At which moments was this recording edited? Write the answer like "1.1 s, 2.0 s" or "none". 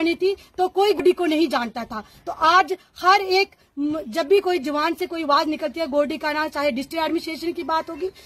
1.0 s